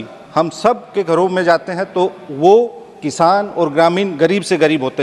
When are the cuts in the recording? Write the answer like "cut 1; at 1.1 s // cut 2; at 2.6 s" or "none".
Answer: none